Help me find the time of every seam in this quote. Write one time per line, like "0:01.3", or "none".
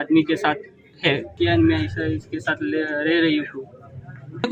0:01.4